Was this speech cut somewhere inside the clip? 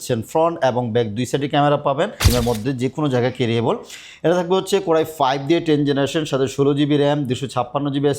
yes; 1 cut; at 2.3 s

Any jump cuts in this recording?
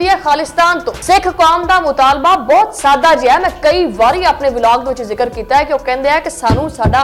yes; 1 cut; at 0.9 s

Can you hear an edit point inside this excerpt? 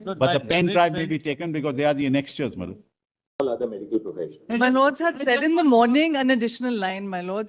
yes; 1 cut; at 3.4 s

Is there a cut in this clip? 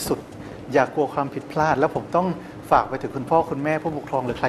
no; 0 cuts

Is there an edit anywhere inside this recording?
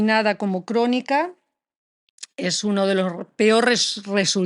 no; 0 cuts

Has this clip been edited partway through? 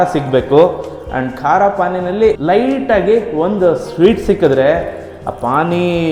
no; 0 cuts

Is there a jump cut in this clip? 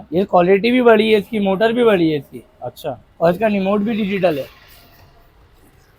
no; 0 cuts

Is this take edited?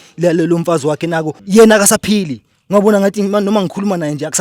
yes; 1 cut; at 1.3 s

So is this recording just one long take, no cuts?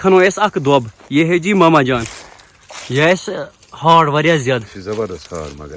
yes; 0 cuts

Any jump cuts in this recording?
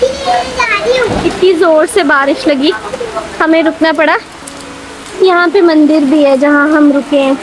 no; 0 cuts

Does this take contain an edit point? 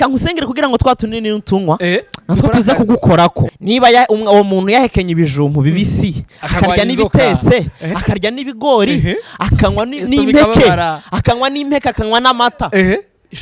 yes; 1 cut; at 3.5 s

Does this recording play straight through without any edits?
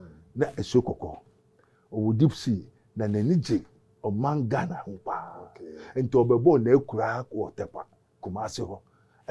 yes; 0 cuts

